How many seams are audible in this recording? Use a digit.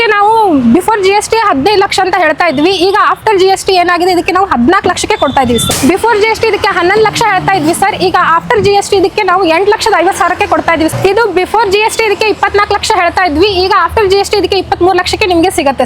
2